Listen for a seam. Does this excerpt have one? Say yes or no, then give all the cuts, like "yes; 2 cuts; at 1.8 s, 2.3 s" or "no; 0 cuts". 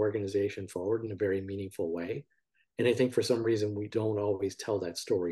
yes; 1 cut; at 3.9 s